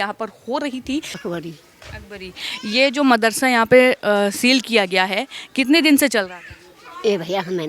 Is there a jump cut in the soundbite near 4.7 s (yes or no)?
no